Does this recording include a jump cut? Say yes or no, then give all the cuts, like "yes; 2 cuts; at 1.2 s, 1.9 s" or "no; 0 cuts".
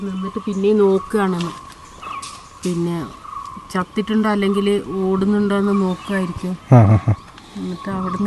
no; 0 cuts